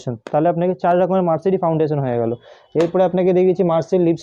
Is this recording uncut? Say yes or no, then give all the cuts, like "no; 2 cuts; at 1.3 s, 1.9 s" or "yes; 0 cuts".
yes; 0 cuts